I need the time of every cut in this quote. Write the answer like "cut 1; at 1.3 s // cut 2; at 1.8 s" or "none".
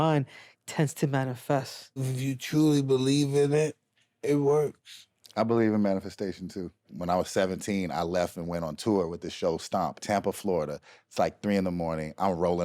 cut 1; at 2.1 s // cut 2; at 6.9 s // cut 3; at 10.0 s

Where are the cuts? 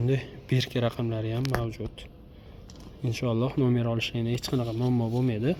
none

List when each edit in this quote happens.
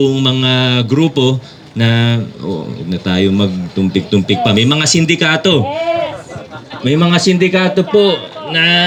none

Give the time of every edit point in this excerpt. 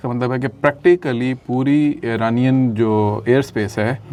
none

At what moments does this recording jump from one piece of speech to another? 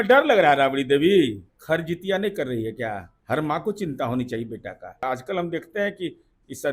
cut 1; at 1.5 s // cut 2; at 3.1 s // cut 3; at 5.0 s

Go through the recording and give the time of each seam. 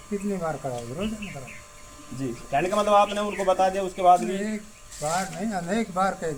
none

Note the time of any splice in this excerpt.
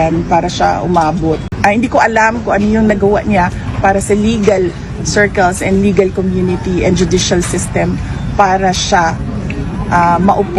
cut 1; at 1.5 s

